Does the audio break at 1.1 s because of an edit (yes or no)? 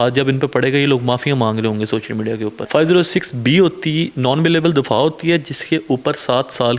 no